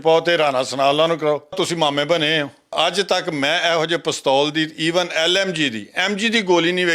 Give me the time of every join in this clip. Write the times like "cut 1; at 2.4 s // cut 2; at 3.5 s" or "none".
cut 1; at 1.6 s // cut 2; at 2.7 s